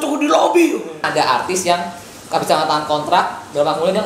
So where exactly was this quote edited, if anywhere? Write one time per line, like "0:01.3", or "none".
0:01.0